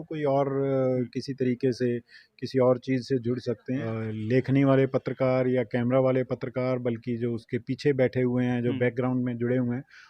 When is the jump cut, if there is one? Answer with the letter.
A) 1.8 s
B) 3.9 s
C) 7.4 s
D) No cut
B